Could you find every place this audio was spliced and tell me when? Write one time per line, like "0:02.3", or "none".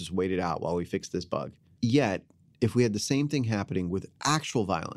0:01.6